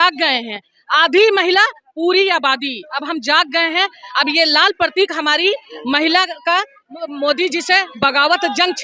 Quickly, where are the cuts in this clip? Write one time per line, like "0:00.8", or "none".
none